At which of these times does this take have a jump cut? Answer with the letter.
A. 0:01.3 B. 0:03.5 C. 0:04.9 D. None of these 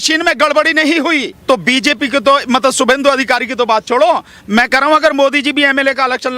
A